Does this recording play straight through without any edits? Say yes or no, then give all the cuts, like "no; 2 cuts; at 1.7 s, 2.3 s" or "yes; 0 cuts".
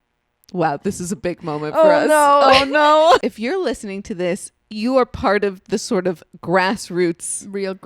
no; 1 cut; at 3.2 s